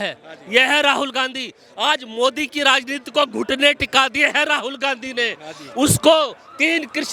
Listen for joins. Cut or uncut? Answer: uncut